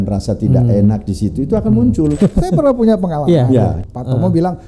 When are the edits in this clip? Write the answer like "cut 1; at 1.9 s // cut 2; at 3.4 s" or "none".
cut 1; at 2.2 s // cut 2; at 3.8 s